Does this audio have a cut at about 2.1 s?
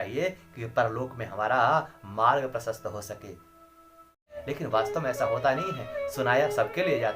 no; 1 cut; at 4.3 s

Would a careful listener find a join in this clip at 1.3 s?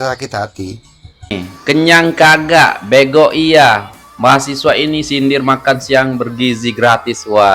yes; 1 cut; at 1.3 s

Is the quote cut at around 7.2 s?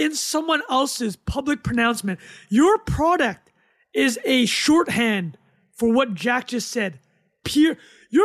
no; 0 cuts

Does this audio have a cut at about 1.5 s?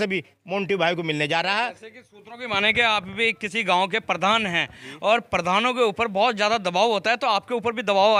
no; 0 cuts

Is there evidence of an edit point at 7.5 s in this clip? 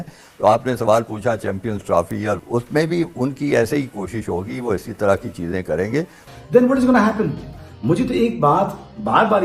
no; 1 cut; at 6.2 s

